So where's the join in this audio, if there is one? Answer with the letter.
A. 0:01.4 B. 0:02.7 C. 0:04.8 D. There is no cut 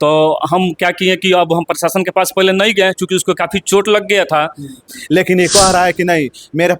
C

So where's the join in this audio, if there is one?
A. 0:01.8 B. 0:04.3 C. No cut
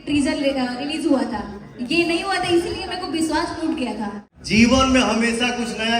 B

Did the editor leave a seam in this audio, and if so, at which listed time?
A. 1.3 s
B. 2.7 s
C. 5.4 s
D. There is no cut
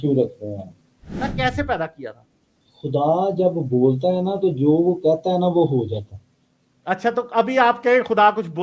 A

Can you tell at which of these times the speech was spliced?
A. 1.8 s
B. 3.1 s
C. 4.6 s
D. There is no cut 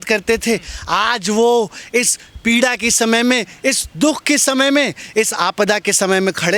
D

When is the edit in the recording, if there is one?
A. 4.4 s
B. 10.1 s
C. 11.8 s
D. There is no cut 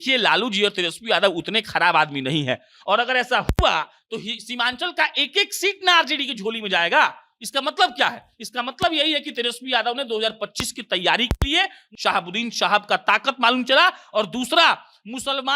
C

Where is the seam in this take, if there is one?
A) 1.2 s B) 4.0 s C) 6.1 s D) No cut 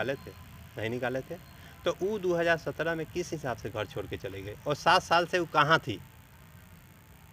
D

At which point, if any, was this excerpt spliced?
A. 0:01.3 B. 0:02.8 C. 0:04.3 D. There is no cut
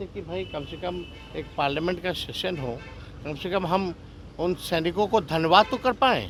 D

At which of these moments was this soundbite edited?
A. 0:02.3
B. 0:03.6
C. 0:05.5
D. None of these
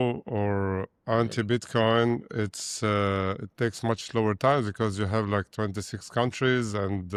D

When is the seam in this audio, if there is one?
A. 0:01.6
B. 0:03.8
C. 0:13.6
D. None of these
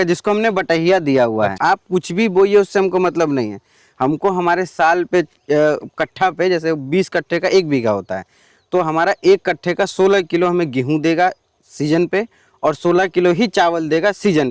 A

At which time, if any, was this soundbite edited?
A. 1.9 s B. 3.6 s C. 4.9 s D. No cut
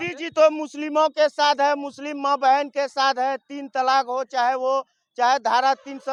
D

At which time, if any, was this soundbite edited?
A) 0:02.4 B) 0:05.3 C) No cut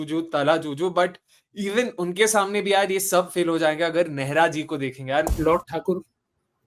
B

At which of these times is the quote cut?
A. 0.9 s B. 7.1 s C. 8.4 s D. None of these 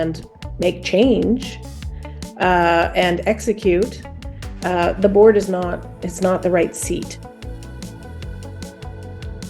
B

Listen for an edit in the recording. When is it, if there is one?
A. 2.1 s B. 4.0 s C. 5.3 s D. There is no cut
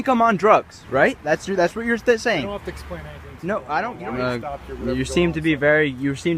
B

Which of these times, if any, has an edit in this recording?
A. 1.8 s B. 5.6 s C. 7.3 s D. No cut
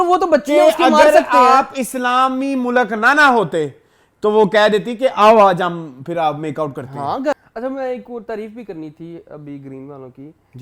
C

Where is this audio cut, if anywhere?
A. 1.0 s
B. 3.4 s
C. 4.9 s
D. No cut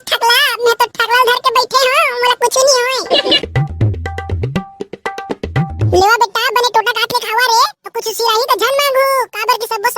B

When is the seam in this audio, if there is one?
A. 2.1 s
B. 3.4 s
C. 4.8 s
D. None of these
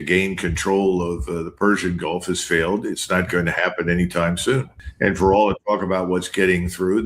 C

